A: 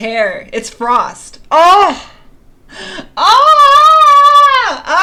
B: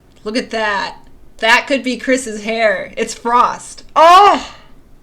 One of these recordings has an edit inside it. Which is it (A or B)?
B